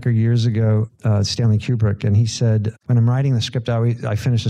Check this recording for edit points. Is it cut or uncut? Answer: cut